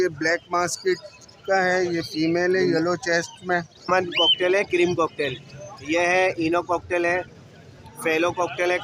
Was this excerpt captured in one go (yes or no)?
no